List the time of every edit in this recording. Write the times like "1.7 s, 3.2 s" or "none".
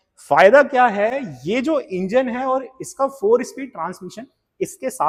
none